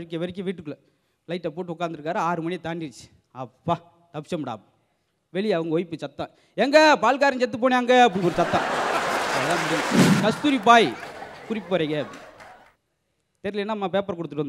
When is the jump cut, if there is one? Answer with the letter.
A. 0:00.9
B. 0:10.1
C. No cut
B